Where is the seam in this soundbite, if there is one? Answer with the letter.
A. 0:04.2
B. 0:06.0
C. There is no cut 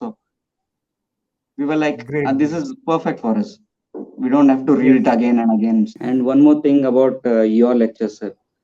B